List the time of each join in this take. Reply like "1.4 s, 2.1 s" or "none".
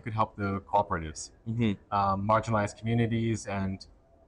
none